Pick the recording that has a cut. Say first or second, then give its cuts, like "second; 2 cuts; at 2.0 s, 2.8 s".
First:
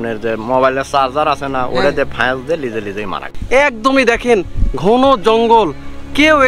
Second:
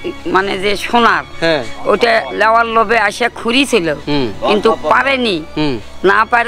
first; 1 cut; at 3.3 s